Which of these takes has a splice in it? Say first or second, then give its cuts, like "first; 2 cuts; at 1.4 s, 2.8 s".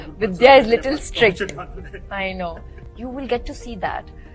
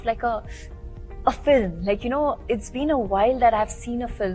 first; 1 cut; at 2.8 s